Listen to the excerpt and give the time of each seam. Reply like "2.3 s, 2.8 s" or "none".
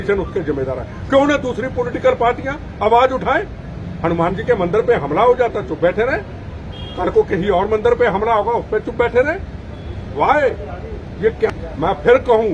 11.5 s